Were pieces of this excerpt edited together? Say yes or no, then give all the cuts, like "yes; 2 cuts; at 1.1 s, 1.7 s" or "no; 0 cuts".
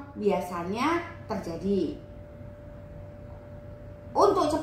no; 0 cuts